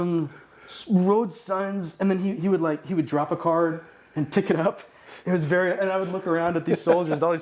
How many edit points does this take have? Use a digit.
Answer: 0